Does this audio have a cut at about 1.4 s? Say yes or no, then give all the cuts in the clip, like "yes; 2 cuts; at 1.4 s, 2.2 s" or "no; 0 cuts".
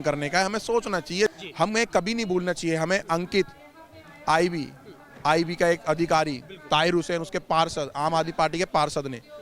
yes; 1 cut; at 1.4 s